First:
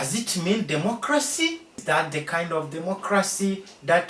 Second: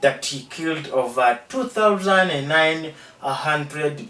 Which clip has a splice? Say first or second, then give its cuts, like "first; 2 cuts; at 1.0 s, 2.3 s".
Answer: first; 1 cut; at 1.8 s